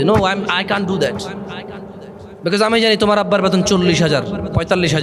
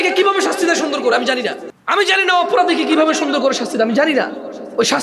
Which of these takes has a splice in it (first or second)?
second